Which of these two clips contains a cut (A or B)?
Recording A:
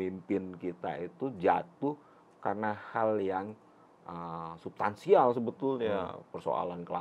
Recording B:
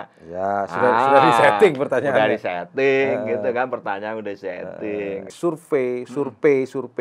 B